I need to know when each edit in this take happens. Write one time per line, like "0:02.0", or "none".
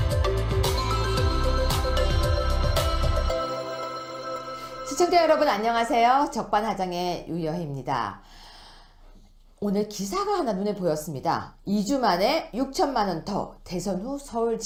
none